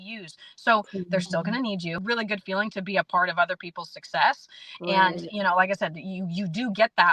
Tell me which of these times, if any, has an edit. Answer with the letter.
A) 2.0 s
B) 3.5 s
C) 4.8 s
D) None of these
A